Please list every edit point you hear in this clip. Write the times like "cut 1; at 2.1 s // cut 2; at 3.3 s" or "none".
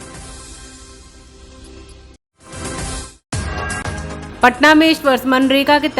none